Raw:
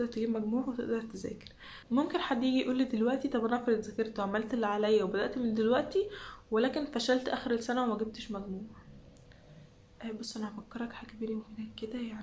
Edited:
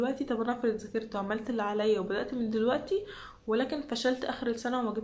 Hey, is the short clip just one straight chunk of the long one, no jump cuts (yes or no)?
yes